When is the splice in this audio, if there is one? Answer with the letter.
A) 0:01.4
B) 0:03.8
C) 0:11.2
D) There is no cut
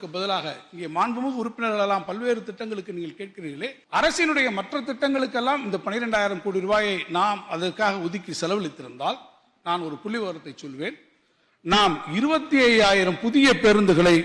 B